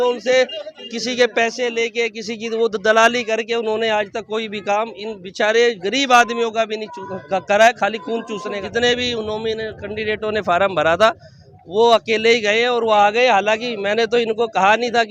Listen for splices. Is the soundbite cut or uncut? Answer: cut